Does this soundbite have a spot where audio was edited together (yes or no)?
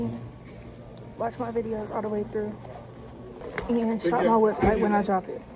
yes